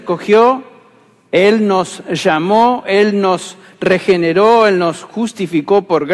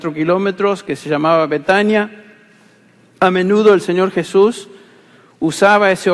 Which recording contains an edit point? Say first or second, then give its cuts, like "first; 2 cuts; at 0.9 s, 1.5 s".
second; 1 cut; at 4.6 s